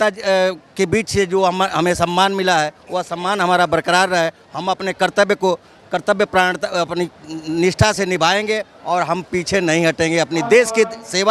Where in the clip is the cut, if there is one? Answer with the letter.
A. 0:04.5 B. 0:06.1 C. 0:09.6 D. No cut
D